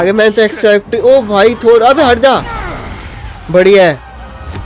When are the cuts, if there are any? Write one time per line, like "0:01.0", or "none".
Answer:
none